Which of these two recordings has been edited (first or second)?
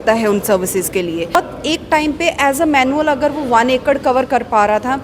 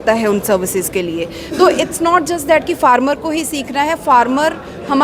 first